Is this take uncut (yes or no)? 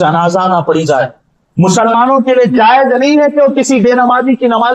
yes